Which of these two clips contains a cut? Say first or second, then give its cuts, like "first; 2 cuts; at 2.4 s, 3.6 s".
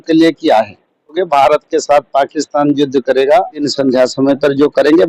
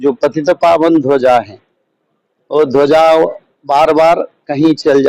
first; 2 cuts; at 1.2 s, 3.7 s